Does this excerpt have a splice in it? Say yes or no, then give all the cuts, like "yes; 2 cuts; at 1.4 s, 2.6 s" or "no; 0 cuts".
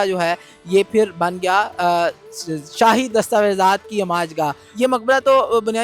yes; 1 cut; at 4.6 s